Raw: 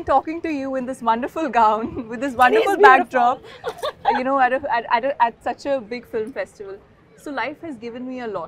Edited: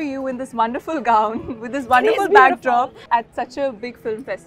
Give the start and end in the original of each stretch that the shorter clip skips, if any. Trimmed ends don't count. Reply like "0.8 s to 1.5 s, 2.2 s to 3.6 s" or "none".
3.5 s to 5.1 s